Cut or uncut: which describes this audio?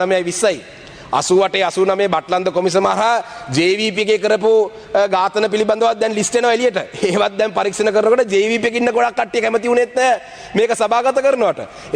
uncut